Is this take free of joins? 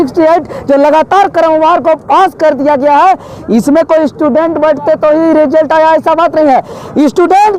yes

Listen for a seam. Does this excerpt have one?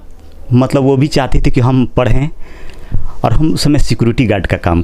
no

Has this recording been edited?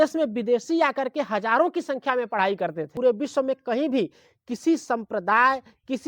yes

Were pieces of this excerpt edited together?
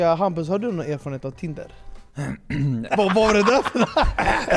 yes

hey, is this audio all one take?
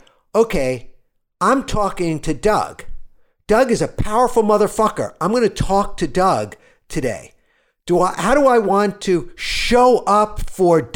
yes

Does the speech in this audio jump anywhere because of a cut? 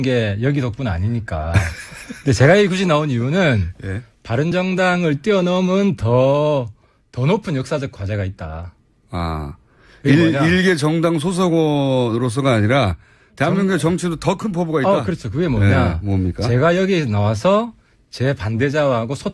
no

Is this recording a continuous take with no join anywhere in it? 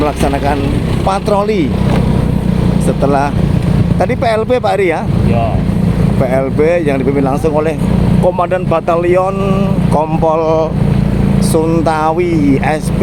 yes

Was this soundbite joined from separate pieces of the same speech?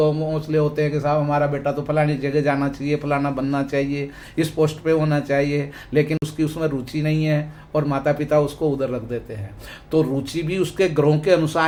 no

